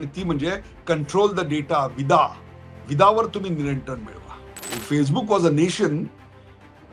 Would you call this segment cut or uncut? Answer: cut